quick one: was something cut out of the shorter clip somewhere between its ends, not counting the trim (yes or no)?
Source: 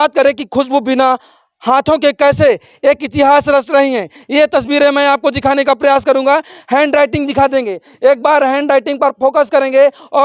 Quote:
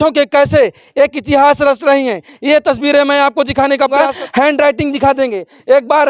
yes